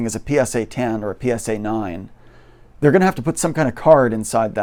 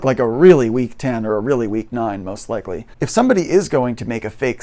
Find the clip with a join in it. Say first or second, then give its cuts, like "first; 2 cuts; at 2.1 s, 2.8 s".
second; 1 cut; at 2.9 s